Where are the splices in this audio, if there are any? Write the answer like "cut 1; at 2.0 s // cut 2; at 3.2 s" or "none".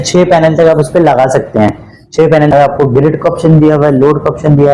cut 1; at 2.5 s